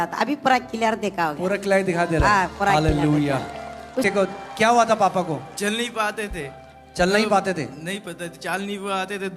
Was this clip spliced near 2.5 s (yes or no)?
no